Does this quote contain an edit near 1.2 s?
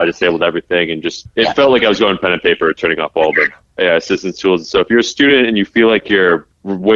yes; 1 cut; at 1.2 s

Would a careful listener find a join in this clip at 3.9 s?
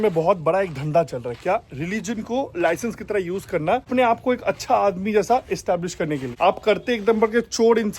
yes; 2 cuts; at 3.9 s, 6.2 s

